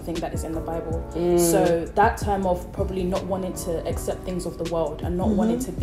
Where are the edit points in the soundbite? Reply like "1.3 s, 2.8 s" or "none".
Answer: none